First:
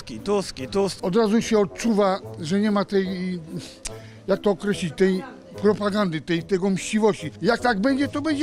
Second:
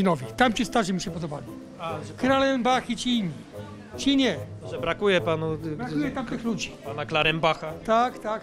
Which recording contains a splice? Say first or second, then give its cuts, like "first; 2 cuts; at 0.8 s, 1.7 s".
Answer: first; 2 cuts; at 1.0 s, 7.3 s